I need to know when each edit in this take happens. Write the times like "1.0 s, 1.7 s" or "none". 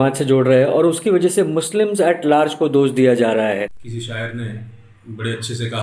3.8 s